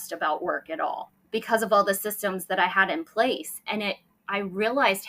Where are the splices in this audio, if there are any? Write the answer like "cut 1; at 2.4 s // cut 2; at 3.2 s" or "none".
cut 1; at 1.1 s